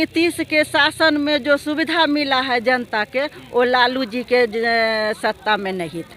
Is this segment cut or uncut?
uncut